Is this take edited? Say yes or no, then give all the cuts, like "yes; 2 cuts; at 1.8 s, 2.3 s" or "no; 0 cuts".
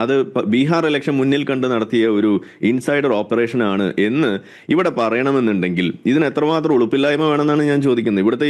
no; 0 cuts